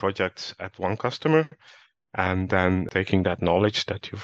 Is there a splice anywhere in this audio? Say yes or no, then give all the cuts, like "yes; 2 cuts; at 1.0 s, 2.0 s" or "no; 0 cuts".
yes; 1 cut; at 2.9 s